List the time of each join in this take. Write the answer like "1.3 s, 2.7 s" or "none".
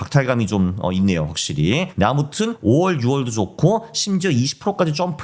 none

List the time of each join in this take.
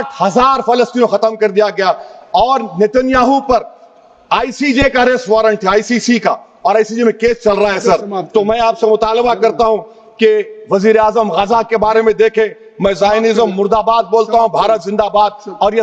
none

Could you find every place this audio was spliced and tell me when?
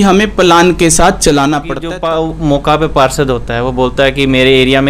1.8 s

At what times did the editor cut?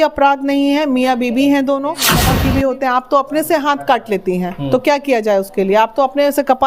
2.2 s

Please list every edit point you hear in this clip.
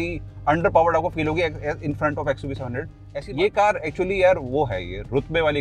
3.1 s

